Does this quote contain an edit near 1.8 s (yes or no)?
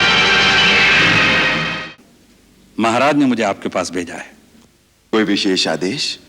yes